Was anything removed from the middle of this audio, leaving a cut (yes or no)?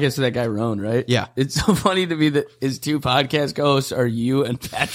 no